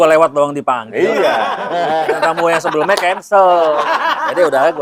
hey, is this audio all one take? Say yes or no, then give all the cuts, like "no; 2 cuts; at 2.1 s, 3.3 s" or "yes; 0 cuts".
yes; 0 cuts